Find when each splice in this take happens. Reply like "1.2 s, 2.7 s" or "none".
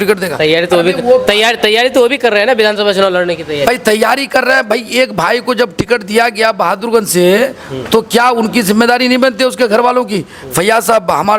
none